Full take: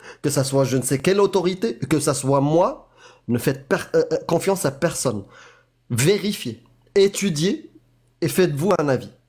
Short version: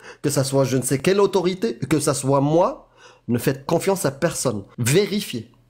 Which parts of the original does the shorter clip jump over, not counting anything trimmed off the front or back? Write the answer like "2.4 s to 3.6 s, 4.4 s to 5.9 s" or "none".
3.6 s to 4.2 s, 5.3 s to 5.8 s